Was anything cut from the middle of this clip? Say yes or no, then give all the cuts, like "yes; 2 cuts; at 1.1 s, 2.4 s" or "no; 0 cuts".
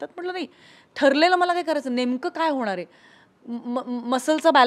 no; 0 cuts